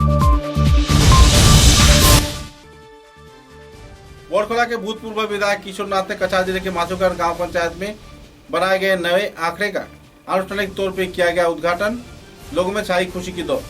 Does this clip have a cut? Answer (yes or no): no